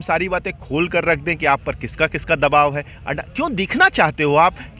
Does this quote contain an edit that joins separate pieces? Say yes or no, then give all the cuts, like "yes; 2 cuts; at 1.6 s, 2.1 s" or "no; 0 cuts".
no; 0 cuts